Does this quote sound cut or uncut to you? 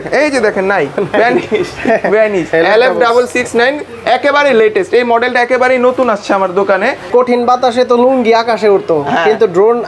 cut